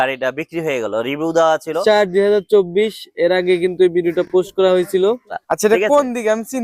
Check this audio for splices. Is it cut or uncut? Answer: cut